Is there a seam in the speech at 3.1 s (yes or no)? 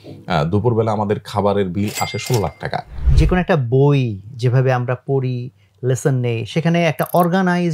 yes